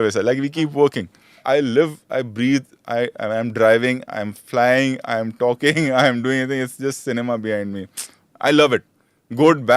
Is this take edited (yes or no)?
yes